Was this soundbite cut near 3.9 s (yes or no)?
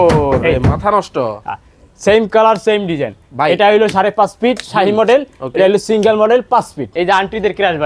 no